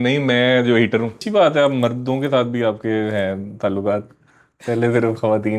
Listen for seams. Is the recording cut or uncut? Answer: cut